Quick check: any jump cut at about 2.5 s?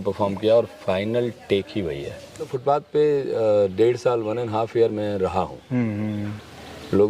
yes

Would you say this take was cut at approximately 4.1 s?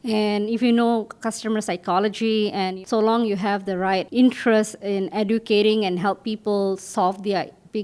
yes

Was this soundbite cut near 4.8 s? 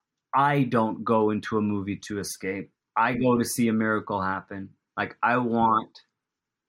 no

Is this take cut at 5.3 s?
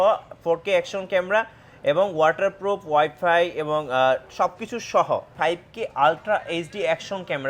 yes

